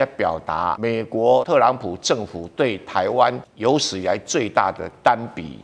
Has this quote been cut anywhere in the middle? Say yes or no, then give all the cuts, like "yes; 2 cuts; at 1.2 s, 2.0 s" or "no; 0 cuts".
yes; 2 cuts; at 1.2 s, 3.5 s